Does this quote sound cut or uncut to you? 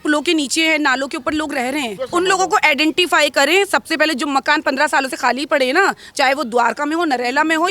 cut